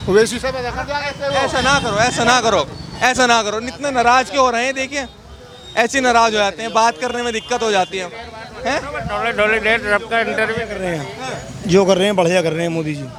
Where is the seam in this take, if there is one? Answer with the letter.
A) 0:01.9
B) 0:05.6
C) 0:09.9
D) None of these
D